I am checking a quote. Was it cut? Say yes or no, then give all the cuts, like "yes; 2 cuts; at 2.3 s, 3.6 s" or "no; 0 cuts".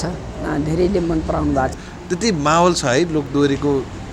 yes; 1 cut; at 1.8 s